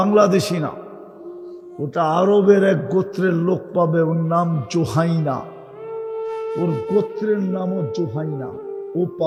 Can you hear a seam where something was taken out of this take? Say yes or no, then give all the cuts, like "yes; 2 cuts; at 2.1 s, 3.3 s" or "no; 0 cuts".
no; 0 cuts